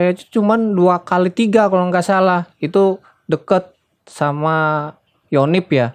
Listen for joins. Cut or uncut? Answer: uncut